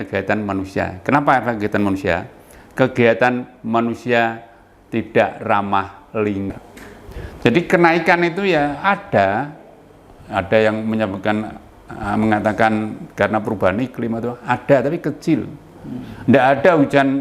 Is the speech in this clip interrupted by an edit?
yes; 1 cut; at 6.6 s

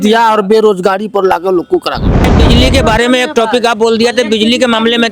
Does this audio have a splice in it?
yes; 1 cut; at 2.3 s

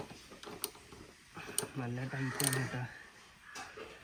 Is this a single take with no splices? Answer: yes; 0 cuts

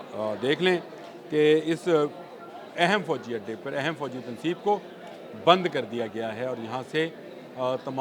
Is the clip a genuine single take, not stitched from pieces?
yes; 0 cuts

